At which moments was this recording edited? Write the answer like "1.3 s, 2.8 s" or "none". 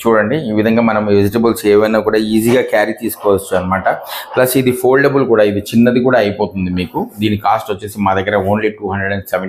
none